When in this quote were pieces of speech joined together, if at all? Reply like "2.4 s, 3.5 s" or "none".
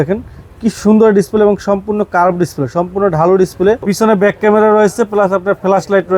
3.9 s